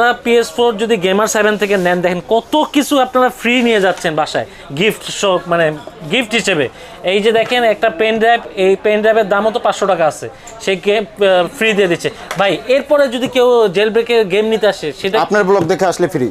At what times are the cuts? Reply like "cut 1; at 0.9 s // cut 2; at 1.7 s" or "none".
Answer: none